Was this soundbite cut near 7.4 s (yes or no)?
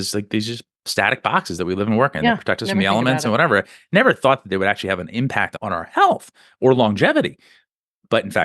no